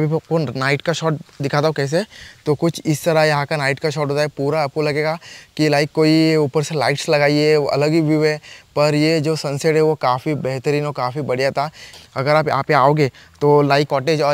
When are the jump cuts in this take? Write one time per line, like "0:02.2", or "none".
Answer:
none